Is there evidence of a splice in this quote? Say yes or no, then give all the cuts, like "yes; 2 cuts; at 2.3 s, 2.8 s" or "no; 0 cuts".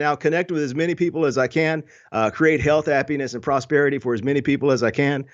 no; 0 cuts